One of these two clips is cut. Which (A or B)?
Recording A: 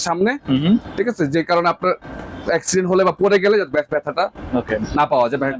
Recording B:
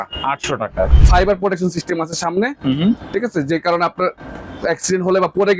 B